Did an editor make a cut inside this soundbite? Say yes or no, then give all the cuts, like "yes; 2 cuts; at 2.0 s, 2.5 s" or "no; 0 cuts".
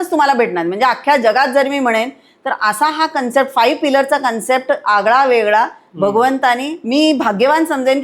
yes; 1 cut; at 6.7 s